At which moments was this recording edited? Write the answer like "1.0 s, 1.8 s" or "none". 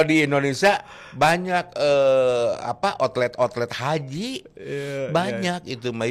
none